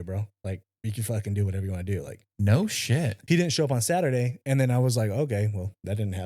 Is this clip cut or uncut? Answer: cut